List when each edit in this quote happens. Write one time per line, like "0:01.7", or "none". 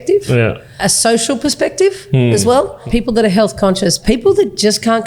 0:00.8
0:02.8
0:04.0